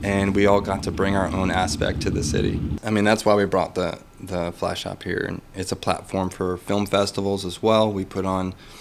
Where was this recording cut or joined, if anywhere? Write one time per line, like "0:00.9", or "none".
0:02.8